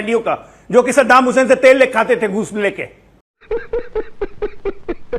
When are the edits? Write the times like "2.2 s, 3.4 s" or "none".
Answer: none

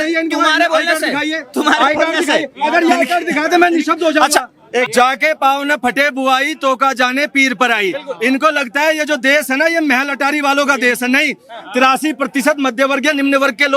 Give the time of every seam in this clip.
4.9 s

